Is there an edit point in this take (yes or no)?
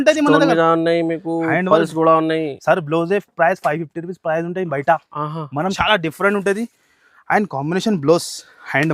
yes